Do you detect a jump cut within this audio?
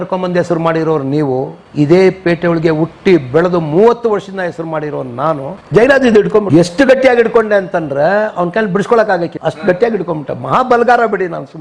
yes; 3 cuts; at 5.5 s, 6.5 s, 9.3 s

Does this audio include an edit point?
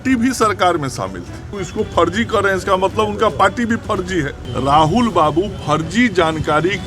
yes; 2 cuts; at 1.6 s, 4.4 s

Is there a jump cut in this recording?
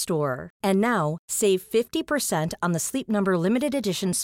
no; 0 cuts

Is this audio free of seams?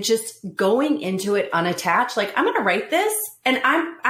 yes; 0 cuts

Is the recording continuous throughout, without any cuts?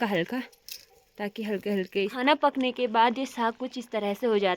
no; 1 cut; at 2.2 s

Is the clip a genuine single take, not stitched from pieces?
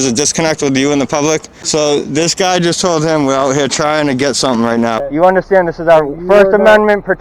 no; 2 cuts; at 1.6 s, 5.0 s

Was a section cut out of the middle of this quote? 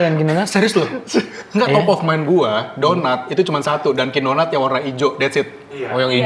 no; 0 cuts

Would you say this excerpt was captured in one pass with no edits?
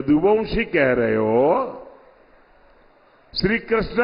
yes; 0 cuts

